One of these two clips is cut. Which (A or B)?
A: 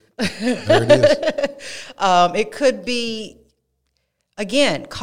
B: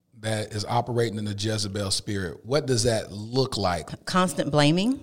B